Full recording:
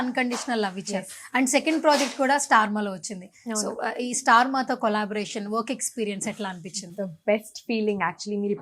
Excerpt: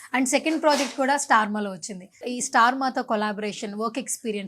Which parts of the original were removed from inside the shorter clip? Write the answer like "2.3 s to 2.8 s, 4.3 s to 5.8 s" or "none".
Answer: 3.4 s to 3.9 s